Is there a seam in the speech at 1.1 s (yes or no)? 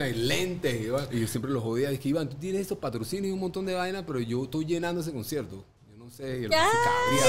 yes